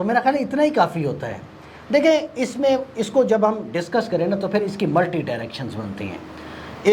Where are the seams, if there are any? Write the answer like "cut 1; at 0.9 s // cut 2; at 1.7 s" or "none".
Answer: none